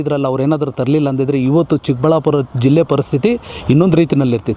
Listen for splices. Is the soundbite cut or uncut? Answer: uncut